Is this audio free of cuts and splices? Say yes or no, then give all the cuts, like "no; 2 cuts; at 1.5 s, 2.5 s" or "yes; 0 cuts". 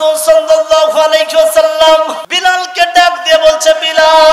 no; 1 cut; at 2.2 s